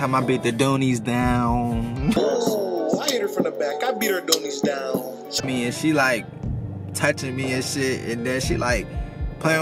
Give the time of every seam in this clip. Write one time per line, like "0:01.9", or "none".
0:02.3
0:05.4